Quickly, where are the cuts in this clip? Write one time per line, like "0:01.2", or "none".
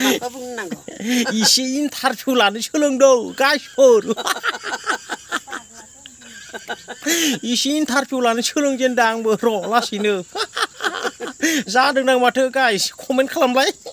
none